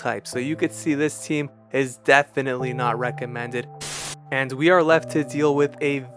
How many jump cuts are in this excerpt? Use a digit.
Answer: 1